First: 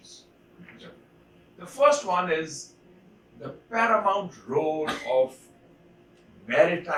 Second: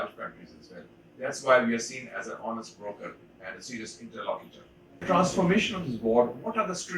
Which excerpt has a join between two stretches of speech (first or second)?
second